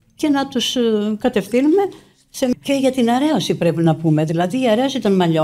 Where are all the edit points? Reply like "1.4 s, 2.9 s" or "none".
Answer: 2.5 s